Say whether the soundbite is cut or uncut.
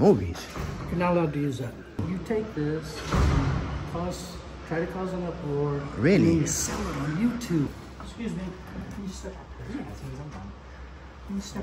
cut